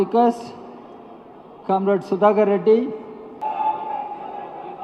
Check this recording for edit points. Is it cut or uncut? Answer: uncut